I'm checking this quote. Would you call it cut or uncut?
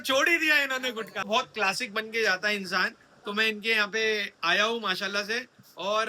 cut